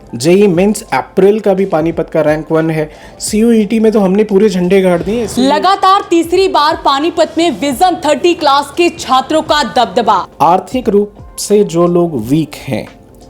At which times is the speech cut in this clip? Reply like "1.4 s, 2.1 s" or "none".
5.2 s, 10.3 s